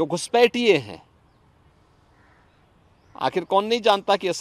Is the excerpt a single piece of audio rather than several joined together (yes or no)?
yes